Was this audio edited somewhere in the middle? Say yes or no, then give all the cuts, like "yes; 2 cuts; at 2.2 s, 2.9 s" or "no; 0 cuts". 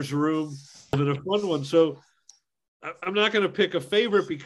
yes; 2 cuts; at 0.9 s, 2.4 s